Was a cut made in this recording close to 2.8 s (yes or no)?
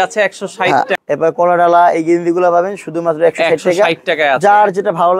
no